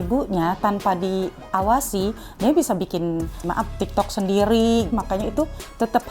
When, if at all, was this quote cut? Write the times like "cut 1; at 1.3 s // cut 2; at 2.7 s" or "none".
cut 1; at 3.4 s // cut 2; at 4.9 s